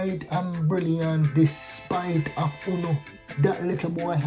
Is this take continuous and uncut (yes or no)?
no